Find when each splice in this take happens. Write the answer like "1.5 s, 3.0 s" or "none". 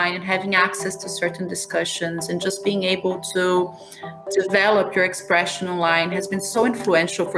none